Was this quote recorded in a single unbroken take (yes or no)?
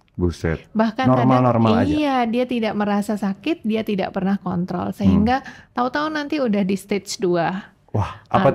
yes